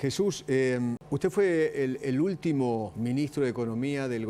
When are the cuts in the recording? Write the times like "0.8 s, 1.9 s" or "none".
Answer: 1.0 s, 2.9 s